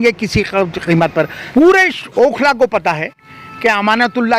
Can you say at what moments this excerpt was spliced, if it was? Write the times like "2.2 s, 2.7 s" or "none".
1.4 s